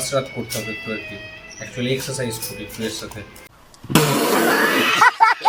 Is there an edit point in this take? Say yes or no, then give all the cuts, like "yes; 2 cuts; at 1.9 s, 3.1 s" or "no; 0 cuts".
no; 0 cuts